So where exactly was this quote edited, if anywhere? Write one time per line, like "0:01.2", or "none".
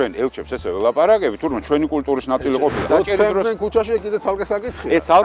0:02.9